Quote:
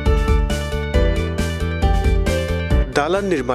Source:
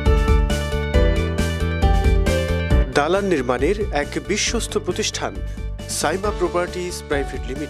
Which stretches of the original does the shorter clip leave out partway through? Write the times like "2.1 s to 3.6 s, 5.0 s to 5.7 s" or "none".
none